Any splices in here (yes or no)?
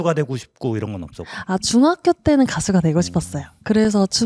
no